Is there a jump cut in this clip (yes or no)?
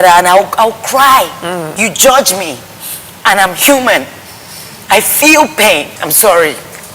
yes